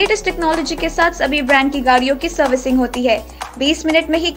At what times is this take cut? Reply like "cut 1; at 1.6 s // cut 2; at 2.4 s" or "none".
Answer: none